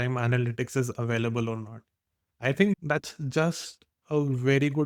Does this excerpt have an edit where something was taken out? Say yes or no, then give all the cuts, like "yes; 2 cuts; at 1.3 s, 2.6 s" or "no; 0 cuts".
no; 0 cuts